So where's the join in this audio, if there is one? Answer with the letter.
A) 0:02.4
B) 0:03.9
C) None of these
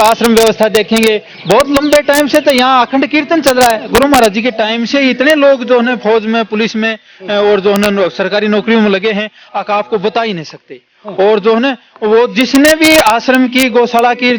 B